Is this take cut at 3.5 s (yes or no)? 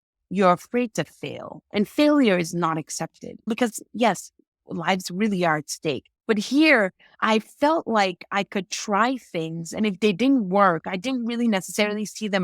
yes